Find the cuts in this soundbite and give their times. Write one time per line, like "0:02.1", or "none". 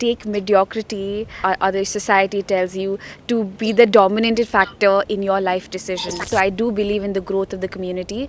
0:01.4
0:06.2